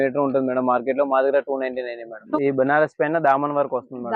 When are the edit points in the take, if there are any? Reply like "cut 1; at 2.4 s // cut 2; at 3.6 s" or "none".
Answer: cut 1; at 2.2 s